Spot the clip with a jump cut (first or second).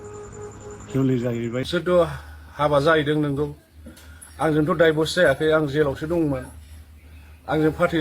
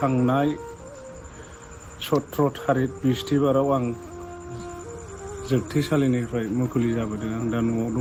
first